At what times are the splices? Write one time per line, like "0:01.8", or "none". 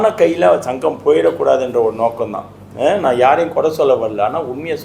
none